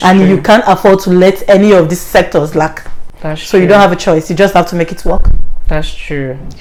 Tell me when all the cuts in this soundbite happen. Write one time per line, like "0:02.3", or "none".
none

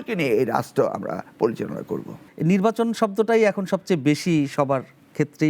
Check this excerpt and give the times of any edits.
none

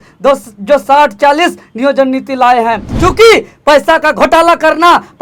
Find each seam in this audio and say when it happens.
0:02.9

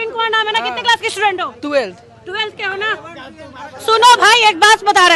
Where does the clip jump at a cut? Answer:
none

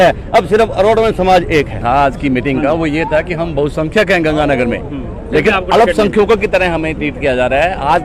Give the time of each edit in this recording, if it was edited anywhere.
0:01.8

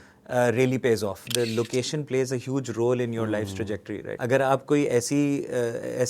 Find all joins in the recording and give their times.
0:01.2
0:04.1

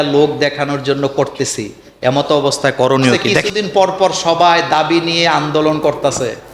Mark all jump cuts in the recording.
0:03.5

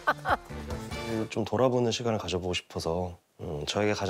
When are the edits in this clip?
0:01.0

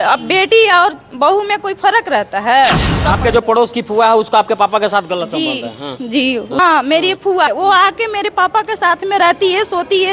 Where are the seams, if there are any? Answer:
0:02.9
0:06.6
0:07.5

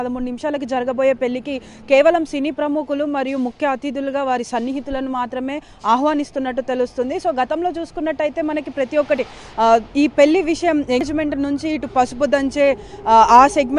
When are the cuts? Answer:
0:11.0

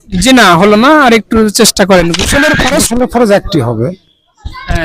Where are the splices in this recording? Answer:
0:02.9

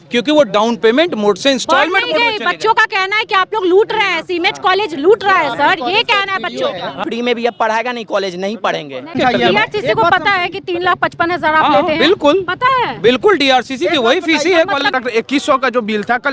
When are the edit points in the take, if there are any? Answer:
0:07.0
0:09.1
0:14.9

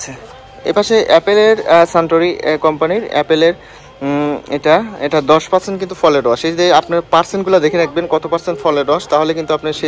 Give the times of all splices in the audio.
none

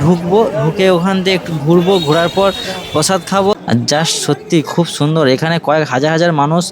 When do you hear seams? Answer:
0:03.5

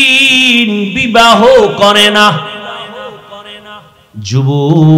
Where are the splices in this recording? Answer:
0:04.0

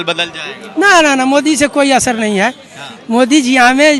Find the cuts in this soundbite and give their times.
none

